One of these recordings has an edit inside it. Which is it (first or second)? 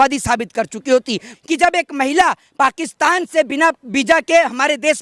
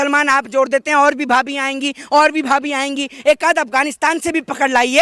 first